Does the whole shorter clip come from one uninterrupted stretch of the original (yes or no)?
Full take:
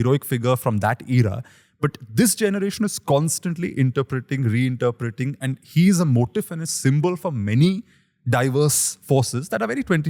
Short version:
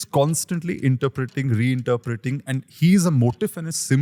yes